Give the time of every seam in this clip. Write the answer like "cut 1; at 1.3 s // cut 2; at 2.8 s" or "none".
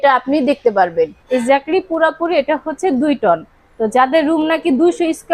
cut 1; at 1.2 s